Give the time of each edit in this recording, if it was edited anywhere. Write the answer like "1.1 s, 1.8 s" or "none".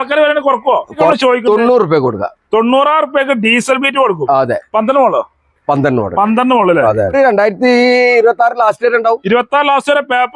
1.1 s, 7.1 s

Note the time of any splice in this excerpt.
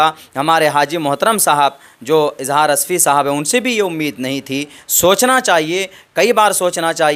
none

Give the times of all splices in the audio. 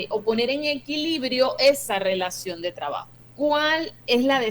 3.2 s

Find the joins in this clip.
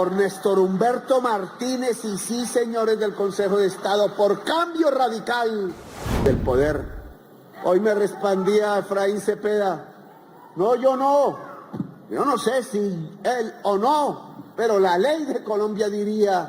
6.3 s

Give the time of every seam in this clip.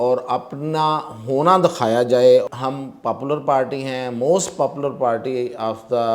2.5 s

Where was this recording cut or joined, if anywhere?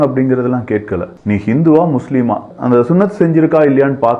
1.1 s, 2.5 s

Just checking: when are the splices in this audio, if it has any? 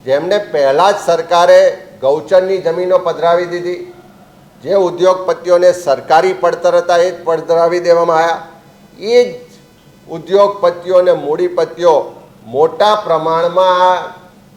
none

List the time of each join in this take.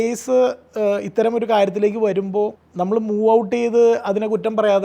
2.6 s

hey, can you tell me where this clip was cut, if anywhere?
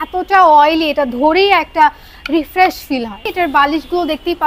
3.2 s

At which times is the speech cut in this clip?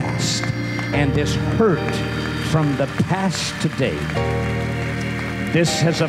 none

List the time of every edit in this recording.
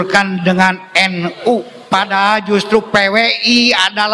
1.8 s

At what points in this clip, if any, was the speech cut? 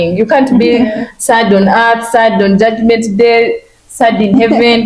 none

